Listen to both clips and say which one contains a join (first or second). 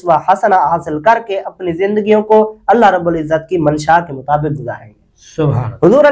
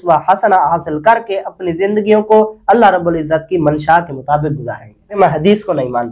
second